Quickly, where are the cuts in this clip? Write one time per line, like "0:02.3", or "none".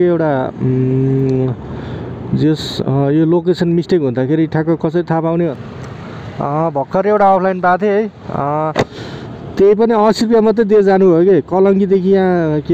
0:05.5